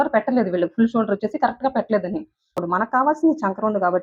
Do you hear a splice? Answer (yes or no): yes